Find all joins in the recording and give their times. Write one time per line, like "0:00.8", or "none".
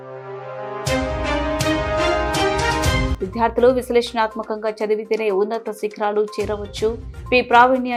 none